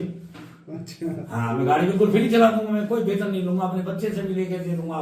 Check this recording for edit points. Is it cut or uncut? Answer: uncut